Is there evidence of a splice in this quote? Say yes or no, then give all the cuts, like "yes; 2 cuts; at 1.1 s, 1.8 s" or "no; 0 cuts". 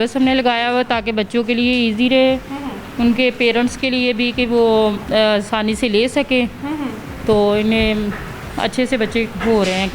no; 0 cuts